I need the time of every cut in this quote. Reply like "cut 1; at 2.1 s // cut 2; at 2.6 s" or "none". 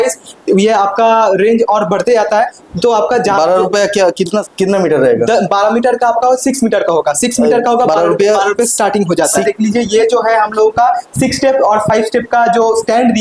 cut 1; at 4.5 s // cut 2; at 9.4 s